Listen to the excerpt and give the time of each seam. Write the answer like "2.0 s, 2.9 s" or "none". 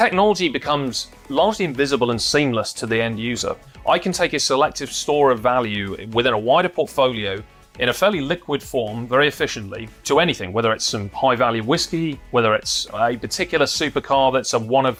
none